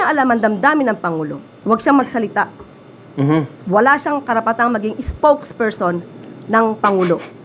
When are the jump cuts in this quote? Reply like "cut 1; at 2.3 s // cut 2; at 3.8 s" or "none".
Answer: cut 1; at 1.5 s // cut 2; at 3.6 s